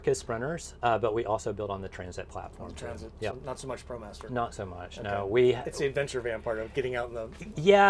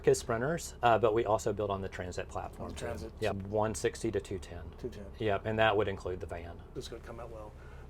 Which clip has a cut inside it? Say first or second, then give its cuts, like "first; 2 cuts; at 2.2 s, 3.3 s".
second; 2 cuts; at 3.4 s, 6.6 s